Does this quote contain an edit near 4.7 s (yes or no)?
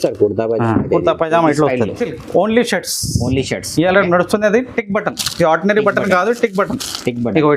no